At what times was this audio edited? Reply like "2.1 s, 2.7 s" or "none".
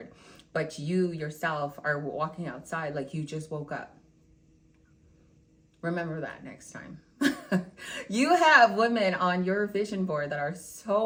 none

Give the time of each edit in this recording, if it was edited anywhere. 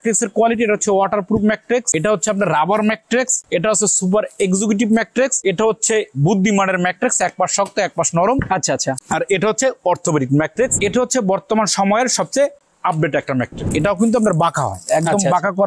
1.9 s, 3.4 s, 5.4 s, 9.0 s, 10.8 s, 13.7 s

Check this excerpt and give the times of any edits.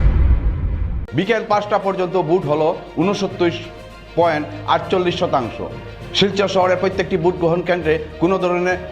1.0 s

